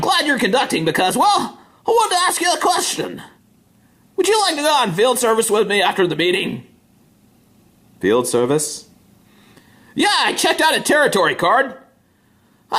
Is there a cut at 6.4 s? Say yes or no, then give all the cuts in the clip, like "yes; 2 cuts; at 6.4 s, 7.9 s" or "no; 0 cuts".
yes; 1 cut; at 6.4 s